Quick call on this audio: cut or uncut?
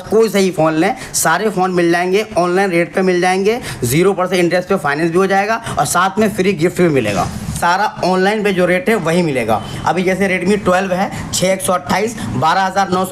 cut